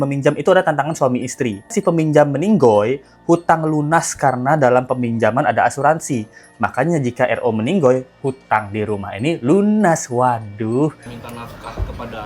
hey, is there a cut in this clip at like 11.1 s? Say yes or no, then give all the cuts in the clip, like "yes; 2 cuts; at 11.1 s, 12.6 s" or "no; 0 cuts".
yes; 2 cuts; at 1.8 s, 11.1 s